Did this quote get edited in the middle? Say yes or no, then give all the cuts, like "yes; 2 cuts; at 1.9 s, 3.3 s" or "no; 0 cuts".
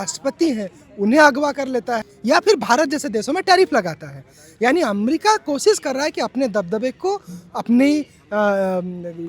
yes; 1 cut; at 2.1 s